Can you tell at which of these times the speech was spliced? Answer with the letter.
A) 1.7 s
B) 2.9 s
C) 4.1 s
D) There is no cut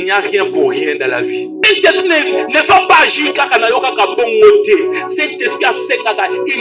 A